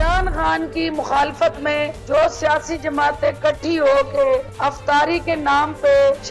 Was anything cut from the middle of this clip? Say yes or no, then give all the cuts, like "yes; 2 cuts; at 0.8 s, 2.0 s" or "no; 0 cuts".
no; 0 cuts